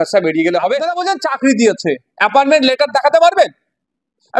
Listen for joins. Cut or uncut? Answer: cut